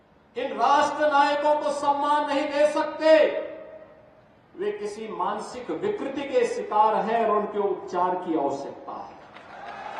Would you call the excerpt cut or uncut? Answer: uncut